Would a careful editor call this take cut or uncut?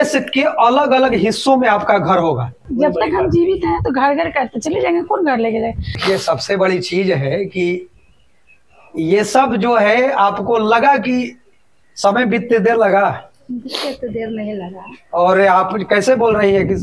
cut